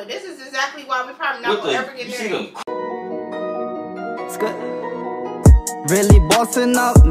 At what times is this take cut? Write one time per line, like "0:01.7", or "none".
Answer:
0:02.5